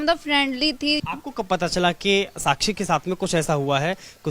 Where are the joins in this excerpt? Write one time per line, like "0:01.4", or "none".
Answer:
0:01.0

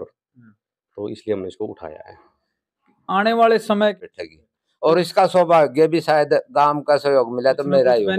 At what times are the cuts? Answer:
0:03.9

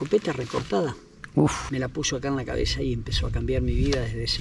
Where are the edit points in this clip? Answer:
none

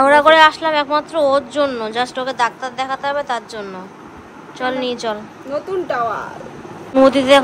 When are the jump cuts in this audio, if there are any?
none

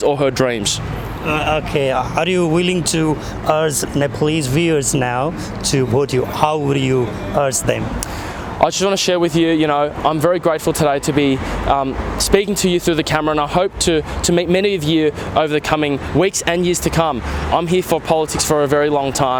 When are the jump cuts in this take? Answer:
none

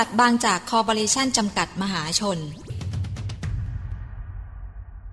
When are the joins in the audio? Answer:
0:02.7

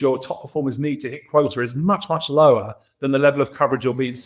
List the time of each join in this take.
none

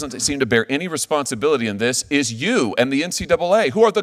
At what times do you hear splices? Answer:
none

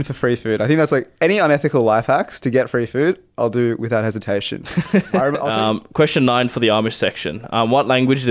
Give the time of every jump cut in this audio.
0:05.4

